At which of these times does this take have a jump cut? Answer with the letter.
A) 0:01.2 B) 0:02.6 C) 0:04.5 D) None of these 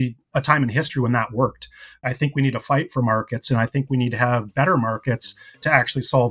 D